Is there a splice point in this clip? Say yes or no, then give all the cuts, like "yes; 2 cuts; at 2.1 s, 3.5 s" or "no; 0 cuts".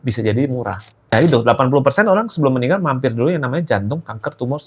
yes; 1 cut; at 1.1 s